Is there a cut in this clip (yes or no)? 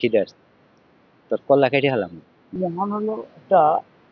yes